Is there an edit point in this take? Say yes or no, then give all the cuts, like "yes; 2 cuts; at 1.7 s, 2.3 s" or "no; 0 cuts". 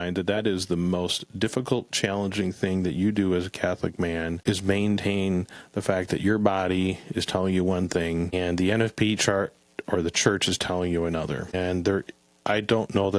yes; 3 cuts; at 4.3 s, 8.3 s, 11.5 s